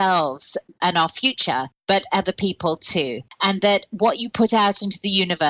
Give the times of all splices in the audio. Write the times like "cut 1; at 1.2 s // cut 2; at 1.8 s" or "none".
cut 1; at 1.7 s // cut 2; at 3.2 s